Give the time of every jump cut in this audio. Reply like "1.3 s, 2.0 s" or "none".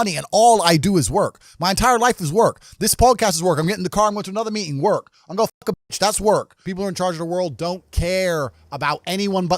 6.6 s